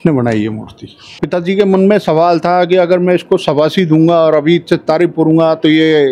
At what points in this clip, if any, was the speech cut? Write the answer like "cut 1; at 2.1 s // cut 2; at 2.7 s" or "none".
cut 1; at 1.2 s

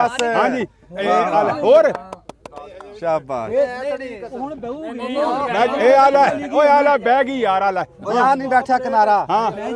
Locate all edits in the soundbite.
none

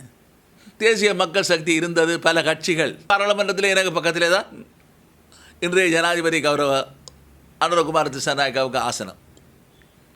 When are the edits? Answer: cut 1; at 3.1 s

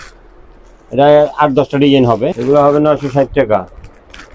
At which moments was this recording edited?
cut 1; at 2.4 s

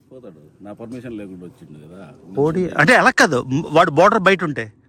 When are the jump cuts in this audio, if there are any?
none

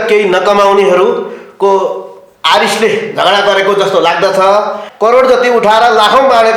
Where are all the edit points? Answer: cut 1; at 4.8 s

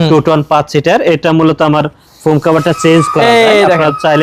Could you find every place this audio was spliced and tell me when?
none

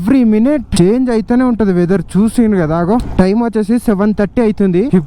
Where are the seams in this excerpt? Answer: cut 1; at 3.0 s

